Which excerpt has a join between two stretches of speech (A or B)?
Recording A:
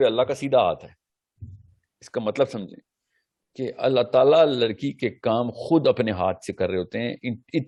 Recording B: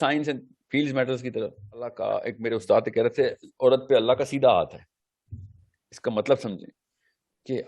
B